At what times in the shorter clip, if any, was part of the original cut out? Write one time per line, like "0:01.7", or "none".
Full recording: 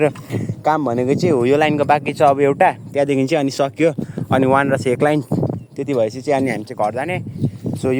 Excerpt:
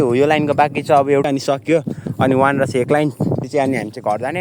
0:01.3
0:03.5